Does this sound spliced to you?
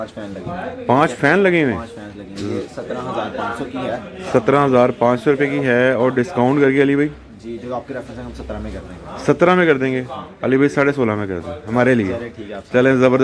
no; 0 cuts

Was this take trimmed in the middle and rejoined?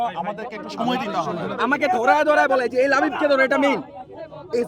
yes; 1 cut; at 1.5 s

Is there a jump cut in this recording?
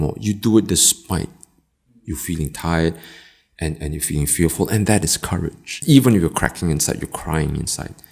yes; 1 cut; at 5.7 s

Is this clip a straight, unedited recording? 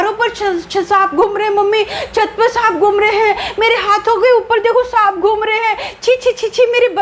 yes; 0 cuts

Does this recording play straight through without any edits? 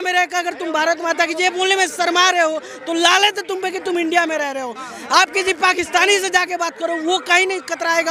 yes; 0 cuts

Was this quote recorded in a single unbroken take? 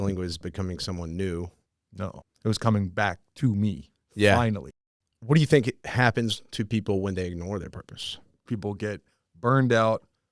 no; 4 cuts; at 2.0 s, 4.7 s, 5.8 s, 8.4 s

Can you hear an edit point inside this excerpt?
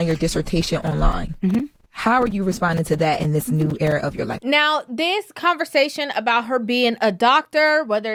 no; 0 cuts

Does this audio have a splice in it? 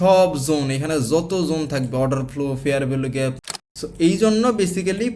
yes; 1 cut; at 3.4 s

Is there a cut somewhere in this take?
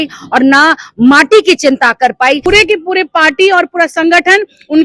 yes; 1 cut; at 2.5 s

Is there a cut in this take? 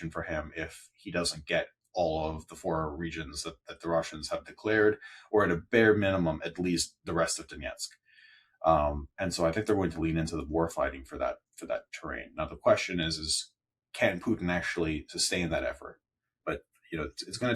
yes; 1 cut; at 16.3 s

